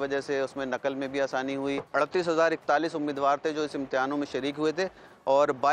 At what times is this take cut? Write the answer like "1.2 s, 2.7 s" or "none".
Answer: 1.9 s